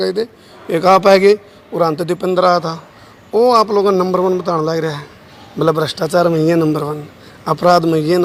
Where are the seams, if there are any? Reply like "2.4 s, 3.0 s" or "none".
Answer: none